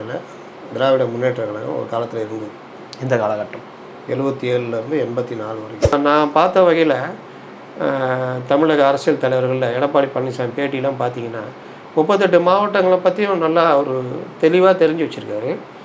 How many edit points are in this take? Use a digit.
1